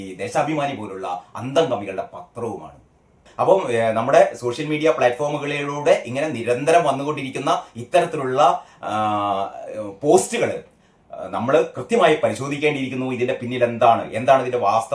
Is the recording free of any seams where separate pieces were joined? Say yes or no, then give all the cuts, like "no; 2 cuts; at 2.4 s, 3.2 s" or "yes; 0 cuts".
no; 1 cut; at 3.3 s